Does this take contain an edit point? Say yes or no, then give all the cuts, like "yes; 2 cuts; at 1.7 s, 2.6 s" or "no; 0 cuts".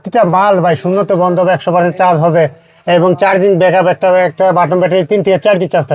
no; 0 cuts